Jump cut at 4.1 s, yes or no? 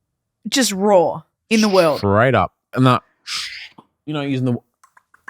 no